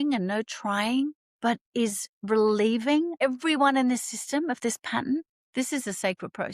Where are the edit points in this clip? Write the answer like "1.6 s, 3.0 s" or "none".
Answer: 1.3 s, 3.2 s, 5.4 s